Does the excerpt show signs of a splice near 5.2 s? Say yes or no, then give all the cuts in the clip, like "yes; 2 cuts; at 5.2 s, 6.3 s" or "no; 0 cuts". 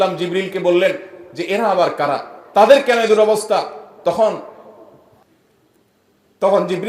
yes; 1 cut; at 5.2 s